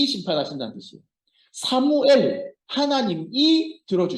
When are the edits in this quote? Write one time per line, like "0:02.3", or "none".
0:02.6